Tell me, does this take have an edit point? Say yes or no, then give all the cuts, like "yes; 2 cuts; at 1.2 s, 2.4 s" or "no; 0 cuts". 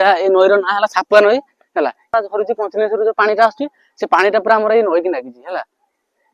yes; 1 cut; at 2.1 s